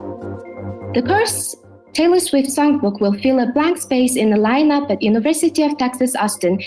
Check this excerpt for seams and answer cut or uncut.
cut